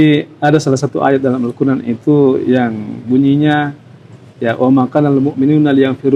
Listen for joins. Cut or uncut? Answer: uncut